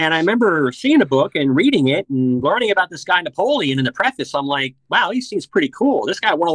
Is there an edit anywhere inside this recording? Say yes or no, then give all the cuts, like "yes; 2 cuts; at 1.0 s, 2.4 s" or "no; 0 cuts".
no; 0 cuts